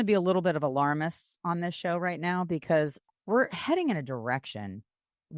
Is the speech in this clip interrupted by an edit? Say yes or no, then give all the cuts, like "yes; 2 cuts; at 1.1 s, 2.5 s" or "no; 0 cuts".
yes; 1 cut; at 3.1 s